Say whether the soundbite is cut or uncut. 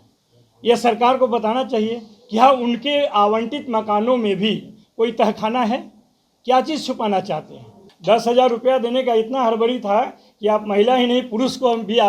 cut